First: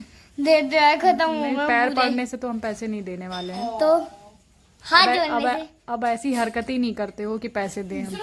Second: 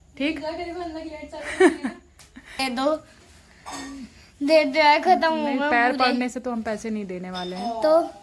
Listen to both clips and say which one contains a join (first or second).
second